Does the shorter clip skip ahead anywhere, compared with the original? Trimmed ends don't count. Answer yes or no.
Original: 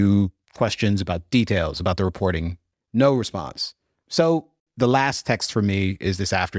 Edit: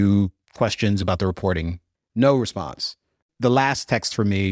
yes